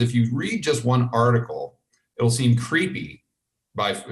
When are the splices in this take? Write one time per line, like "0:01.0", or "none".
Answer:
0:02.0